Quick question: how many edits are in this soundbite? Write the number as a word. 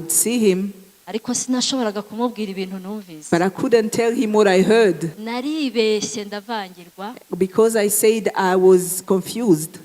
one